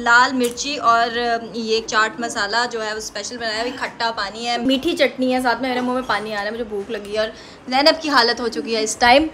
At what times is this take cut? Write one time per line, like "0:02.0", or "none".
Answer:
none